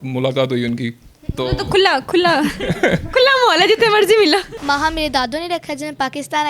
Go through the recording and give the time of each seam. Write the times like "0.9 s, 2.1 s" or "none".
4.5 s

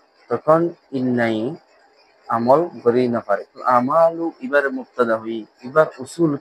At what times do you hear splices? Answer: 3.6 s

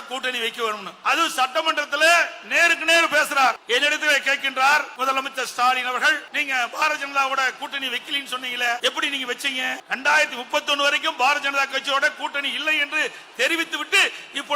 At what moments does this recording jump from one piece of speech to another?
0.9 s, 3.6 s, 4.9 s, 6.3 s, 8.8 s, 9.8 s

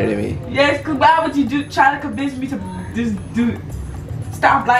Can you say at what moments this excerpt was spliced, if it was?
none

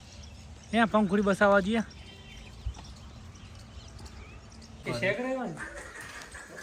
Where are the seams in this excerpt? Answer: 4.8 s

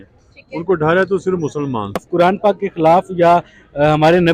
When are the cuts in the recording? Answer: 2.0 s

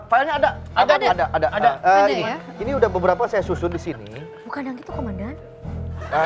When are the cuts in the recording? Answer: none

